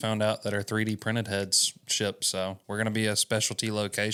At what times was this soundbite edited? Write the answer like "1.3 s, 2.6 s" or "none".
none